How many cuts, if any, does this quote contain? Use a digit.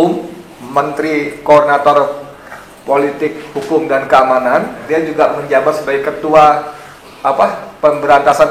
1